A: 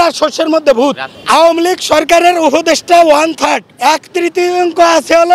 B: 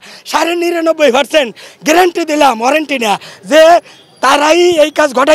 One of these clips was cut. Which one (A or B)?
A